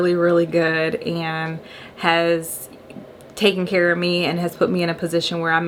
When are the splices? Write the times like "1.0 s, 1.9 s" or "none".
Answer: none